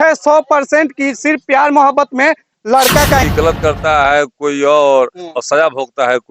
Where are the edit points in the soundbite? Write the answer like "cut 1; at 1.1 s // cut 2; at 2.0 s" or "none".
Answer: cut 1; at 3.2 s